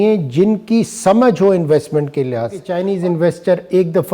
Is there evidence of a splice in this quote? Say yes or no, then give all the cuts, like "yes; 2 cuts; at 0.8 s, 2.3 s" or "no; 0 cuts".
yes; 1 cut; at 2.7 s